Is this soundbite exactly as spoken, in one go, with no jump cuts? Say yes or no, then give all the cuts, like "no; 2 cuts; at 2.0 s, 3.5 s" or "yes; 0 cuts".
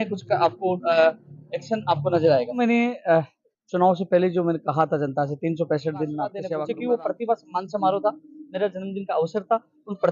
no; 2 cuts; at 2.6 s, 6.4 s